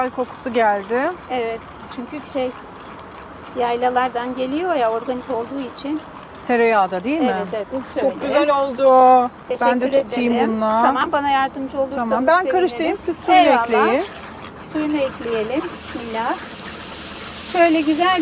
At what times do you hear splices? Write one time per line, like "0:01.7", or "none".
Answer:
none